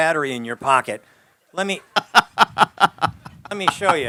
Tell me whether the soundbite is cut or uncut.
uncut